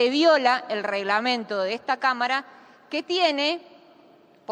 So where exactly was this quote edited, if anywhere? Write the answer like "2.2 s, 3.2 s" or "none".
none